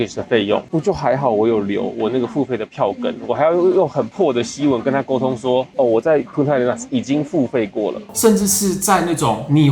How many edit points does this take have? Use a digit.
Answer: 1